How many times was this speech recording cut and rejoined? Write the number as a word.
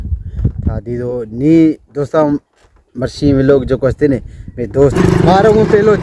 one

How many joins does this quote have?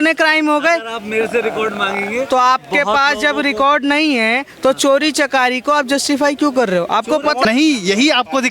one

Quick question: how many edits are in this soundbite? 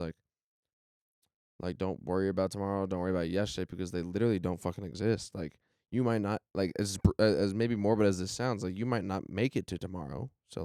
zero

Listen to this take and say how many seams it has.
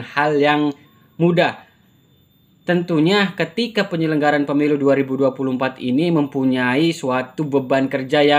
zero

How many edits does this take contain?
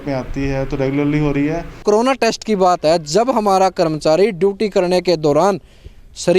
one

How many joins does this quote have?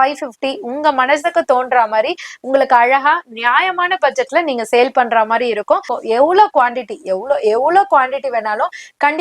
one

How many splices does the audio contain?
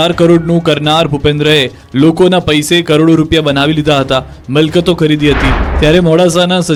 zero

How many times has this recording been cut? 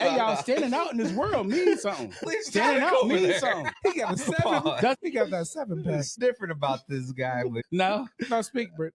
five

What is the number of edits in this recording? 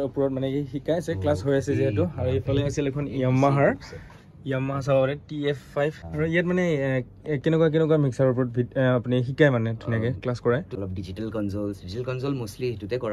two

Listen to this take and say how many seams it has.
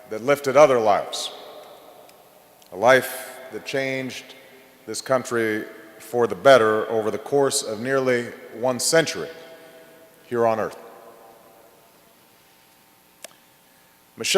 one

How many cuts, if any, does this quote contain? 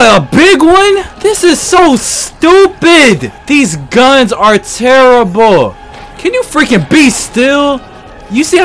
two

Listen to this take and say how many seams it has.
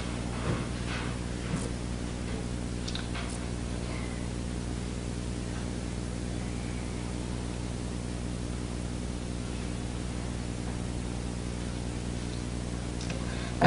one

